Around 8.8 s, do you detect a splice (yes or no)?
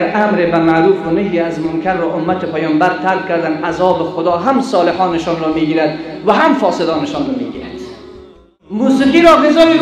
yes